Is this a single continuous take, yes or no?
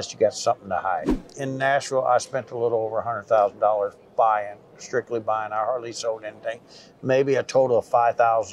no